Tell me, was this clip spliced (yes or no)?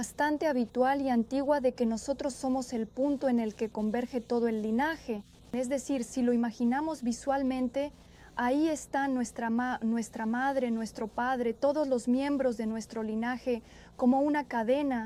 no